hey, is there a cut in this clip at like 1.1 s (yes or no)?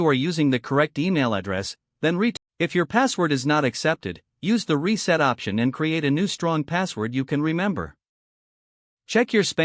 no